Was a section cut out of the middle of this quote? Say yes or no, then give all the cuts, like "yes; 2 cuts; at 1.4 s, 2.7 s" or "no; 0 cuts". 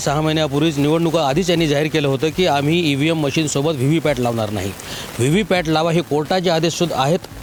no; 0 cuts